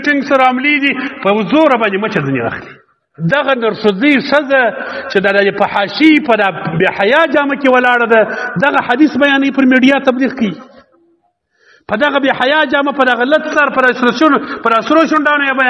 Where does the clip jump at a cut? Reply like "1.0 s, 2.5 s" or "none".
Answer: 3.1 s